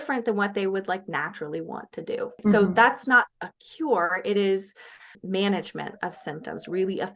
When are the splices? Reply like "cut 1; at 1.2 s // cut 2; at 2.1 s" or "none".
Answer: cut 1; at 2.4 s // cut 2; at 5.1 s